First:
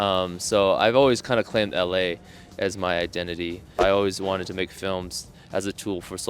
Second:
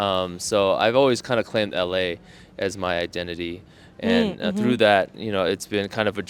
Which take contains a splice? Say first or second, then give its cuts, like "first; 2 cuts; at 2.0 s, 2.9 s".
first; 1 cut; at 3.8 s